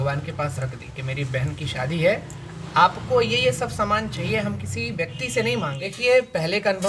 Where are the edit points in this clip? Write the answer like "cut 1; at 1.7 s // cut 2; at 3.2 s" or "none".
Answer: cut 1; at 5.9 s